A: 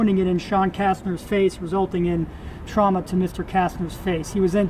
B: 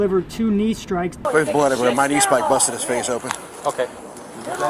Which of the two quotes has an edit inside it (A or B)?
B